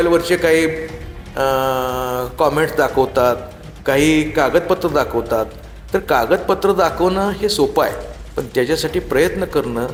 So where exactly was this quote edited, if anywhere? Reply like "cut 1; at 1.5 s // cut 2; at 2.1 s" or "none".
none